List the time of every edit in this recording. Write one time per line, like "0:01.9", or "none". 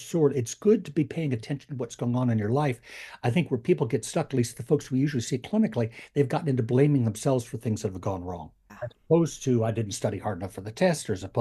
0:08.6